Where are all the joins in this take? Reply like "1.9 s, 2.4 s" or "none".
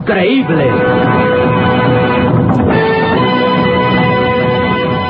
1.1 s